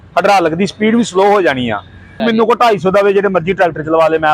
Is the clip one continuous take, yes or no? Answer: no